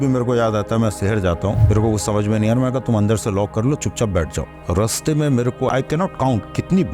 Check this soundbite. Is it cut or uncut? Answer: cut